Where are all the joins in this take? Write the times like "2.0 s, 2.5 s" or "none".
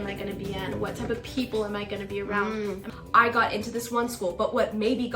2.9 s